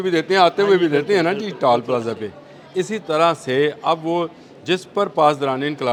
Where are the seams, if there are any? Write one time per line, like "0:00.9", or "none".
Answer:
none